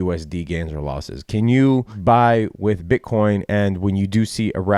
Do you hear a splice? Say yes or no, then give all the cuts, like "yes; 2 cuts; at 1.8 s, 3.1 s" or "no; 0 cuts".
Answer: yes; 1 cut; at 1.9 s